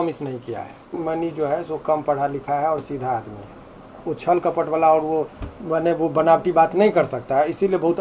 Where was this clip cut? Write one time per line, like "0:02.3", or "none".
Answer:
0:01.0